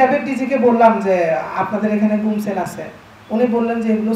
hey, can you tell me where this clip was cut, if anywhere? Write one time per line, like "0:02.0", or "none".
none